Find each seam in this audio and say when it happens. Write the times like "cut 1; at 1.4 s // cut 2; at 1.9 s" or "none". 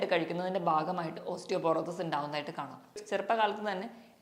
cut 1; at 3.0 s